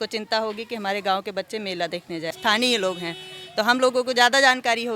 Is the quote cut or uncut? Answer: cut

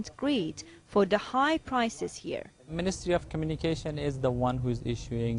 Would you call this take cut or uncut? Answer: uncut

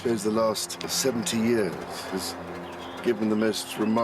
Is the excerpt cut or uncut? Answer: cut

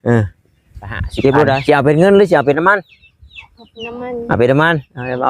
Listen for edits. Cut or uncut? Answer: cut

